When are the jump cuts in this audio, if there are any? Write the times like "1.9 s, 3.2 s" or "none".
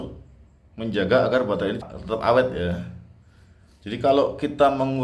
1.8 s